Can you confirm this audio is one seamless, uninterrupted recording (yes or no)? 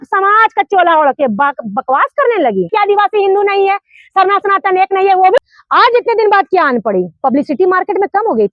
no